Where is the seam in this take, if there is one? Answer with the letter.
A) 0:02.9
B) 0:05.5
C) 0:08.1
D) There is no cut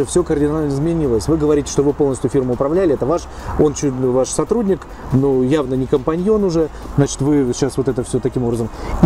D